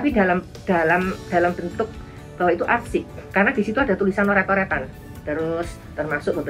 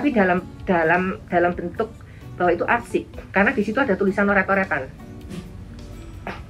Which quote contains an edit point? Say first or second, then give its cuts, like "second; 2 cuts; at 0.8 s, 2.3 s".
first; 1 cut; at 5.0 s